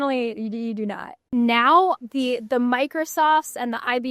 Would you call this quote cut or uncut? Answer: cut